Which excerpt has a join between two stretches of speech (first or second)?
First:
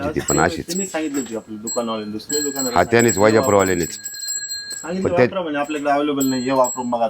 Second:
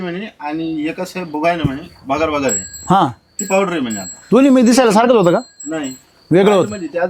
first